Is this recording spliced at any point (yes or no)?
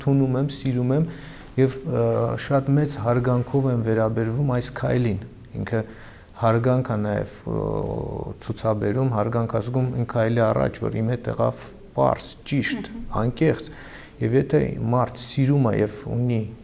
no